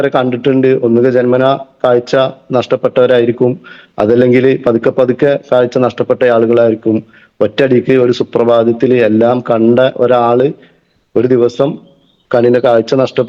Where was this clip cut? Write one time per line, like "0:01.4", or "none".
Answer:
none